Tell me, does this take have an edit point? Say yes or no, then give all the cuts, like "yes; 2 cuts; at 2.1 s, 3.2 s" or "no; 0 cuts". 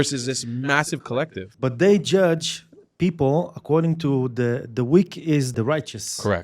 yes; 2 cuts; at 1.5 s, 5.5 s